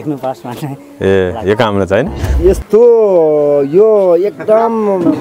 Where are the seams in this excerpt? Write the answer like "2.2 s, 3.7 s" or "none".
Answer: 2.2 s